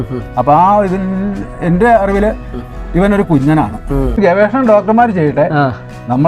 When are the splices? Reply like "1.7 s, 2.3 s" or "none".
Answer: 4.2 s